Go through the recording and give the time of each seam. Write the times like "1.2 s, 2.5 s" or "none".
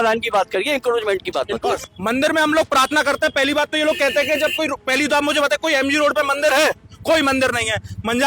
1.9 s

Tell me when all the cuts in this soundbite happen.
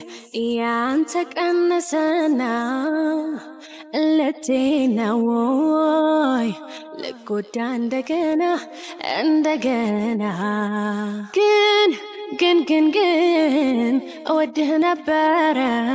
none

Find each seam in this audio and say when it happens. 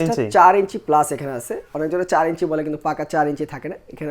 none

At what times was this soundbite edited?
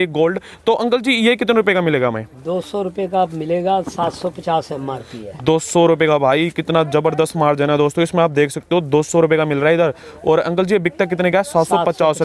none

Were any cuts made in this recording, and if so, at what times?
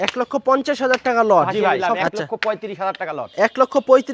1.8 s

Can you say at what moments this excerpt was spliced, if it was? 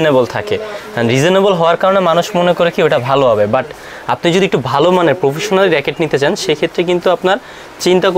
none

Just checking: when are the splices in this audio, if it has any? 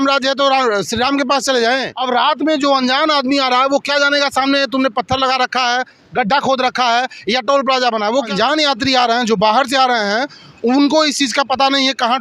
1.9 s, 8.3 s

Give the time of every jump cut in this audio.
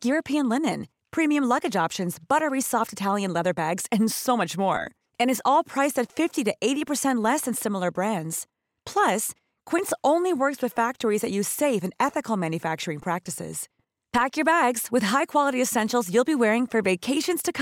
none

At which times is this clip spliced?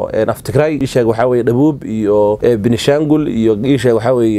0.8 s, 2.4 s

